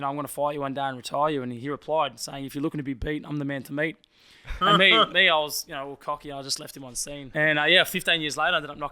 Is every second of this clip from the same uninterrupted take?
no; 1 cut; at 7.3 s

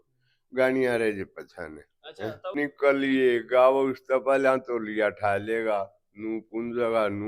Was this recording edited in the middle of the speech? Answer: yes; 1 cut; at 2.6 s

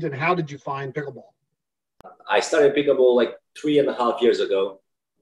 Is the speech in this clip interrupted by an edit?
yes; 1 cut; at 2.1 s

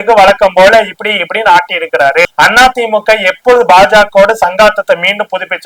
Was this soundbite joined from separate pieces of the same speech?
yes; 1 cut; at 2.2 s

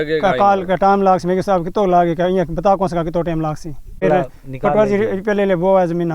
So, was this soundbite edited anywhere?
yes; 1 cut; at 4.0 s

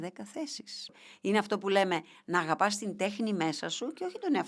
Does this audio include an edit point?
yes; 1 cut; at 1.0 s

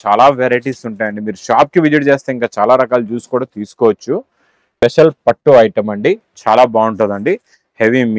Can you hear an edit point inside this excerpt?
yes; 1 cut; at 4.8 s

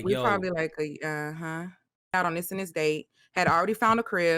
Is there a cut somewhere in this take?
yes; 1 cut; at 2.1 s

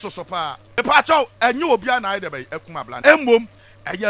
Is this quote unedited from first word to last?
no; 2 cuts; at 0.8 s, 3.0 s

